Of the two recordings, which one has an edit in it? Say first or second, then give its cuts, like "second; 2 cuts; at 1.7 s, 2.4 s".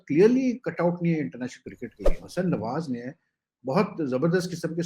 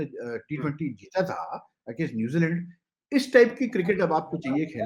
first; 1 cut; at 2.2 s